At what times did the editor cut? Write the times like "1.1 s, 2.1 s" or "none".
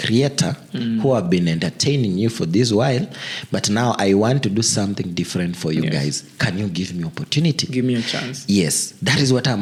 none